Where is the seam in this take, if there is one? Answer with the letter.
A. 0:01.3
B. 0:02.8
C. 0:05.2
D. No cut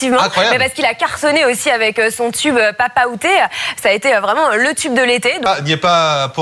C